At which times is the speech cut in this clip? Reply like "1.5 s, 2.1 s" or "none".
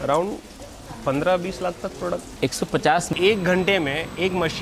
3.1 s